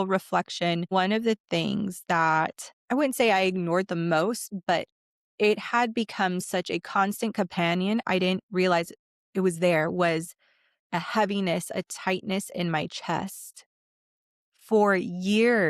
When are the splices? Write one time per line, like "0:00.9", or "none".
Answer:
0:00.9